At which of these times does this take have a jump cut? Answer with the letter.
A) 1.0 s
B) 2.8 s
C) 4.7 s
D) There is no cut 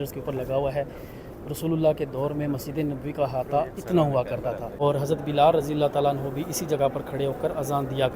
C